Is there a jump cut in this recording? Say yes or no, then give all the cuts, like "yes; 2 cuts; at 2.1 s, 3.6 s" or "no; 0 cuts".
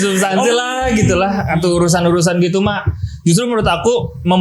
no; 0 cuts